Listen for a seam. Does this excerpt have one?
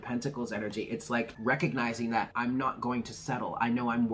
yes; 2 cuts; at 1.3 s, 2.3 s

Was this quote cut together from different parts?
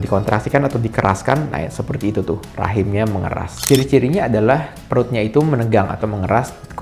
yes; 1 cut; at 3.6 s

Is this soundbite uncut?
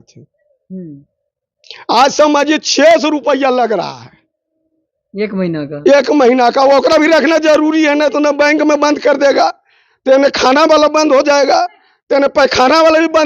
yes; 0 cuts

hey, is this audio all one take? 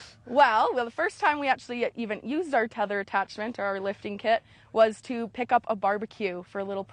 yes; 0 cuts

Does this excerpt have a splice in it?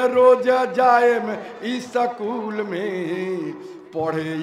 no; 0 cuts

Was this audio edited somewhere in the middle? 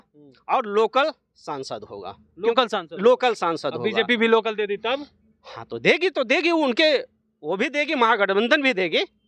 no; 0 cuts

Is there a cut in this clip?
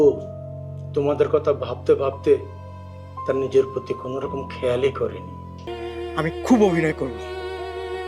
yes; 1 cut; at 5.7 s

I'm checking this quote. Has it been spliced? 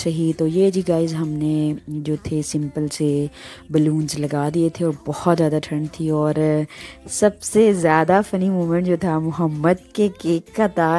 no; 0 cuts

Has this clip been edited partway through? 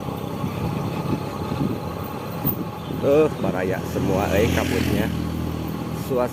no; 0 cuts

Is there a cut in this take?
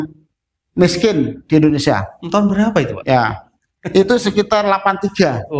no; 0 cuts

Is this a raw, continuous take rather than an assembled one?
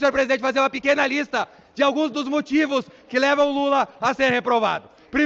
yes; 0 cuts

